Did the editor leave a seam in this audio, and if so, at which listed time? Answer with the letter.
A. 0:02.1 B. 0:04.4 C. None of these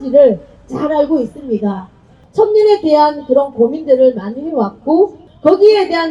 A